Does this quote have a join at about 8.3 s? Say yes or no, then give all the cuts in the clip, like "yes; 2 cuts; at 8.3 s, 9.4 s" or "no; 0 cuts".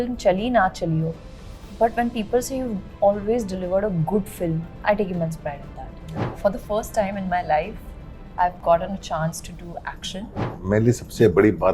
no; 3 cuts; at 4.7 s, 6.4 s, 10.6 s